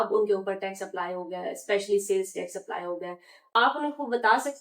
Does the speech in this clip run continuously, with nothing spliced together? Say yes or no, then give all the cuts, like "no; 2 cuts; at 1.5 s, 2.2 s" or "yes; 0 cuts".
no; 1 cut; at 3.5 s